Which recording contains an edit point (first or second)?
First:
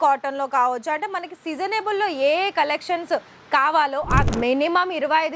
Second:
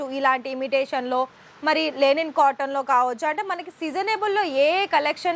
first